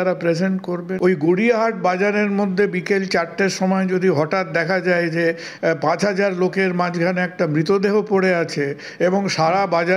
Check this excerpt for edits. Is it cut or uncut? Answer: cut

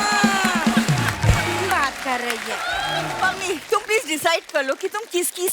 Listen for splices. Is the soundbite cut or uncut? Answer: cut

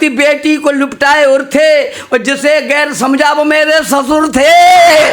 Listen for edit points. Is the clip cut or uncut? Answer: uncut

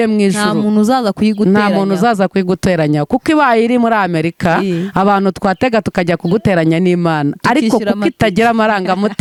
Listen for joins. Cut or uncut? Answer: uncut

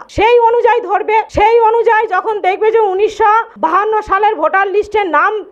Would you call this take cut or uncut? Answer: cut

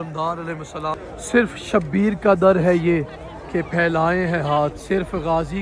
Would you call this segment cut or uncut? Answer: cut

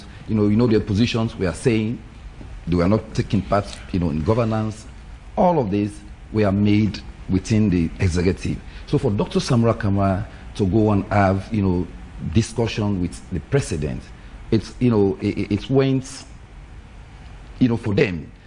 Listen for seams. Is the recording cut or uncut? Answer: uncut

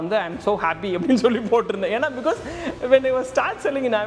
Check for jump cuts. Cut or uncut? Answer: uncut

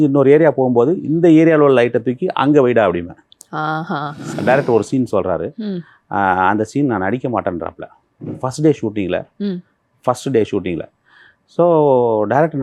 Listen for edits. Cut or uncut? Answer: cut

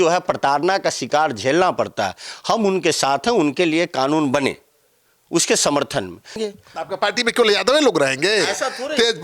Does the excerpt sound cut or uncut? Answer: cut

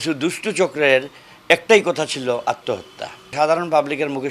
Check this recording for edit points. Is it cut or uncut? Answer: cut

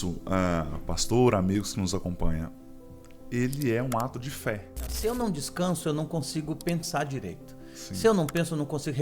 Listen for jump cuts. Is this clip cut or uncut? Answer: cut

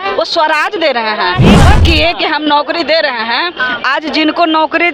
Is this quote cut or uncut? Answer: cut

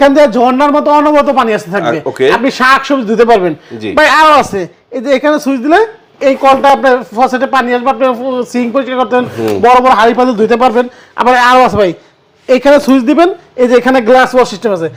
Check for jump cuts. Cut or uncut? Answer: uncut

